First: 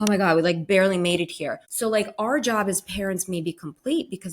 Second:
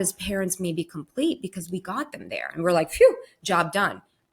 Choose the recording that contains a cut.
first; 1 cut; at 1.6 s

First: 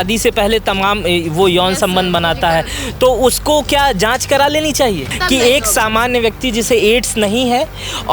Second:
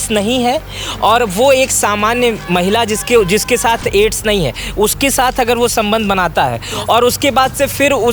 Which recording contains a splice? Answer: first; 1 cut; at 5.1 s

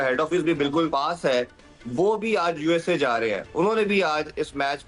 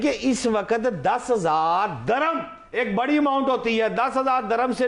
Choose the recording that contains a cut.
first; 1 cut; at 0.9 s

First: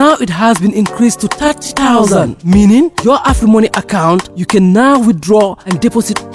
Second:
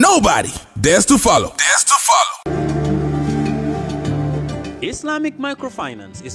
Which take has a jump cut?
second; 1 cut; at 2.4 s

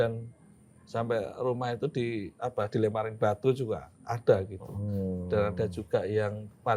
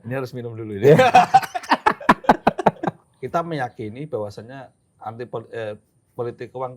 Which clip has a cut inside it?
second; 1 cut; at 3.0 s

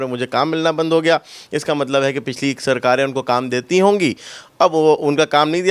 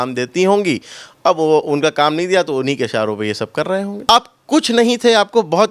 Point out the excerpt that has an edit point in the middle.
second; 1 cut; at 4.1 s

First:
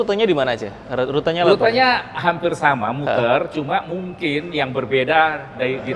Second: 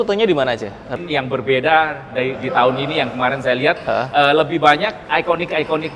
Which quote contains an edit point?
second; 2 cuts; at 0.9 s, 5.0 s

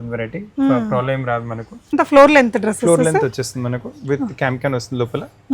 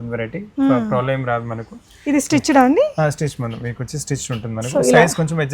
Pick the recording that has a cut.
first; 1 cut; at 1.8 s

